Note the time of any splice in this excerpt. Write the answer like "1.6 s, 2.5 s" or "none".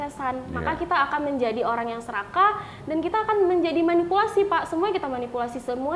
none